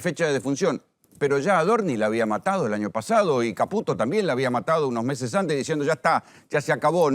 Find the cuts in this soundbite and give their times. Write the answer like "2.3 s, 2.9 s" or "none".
none